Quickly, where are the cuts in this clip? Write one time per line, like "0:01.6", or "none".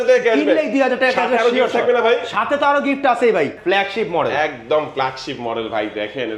0:03.6